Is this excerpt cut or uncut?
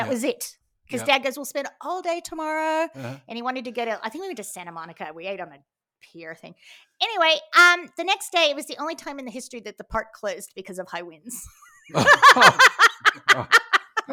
uncut